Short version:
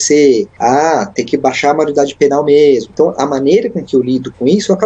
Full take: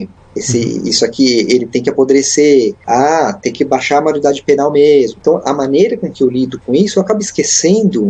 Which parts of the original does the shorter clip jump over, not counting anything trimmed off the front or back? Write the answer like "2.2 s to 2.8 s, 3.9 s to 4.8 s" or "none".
none